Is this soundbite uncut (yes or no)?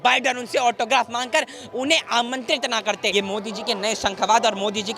no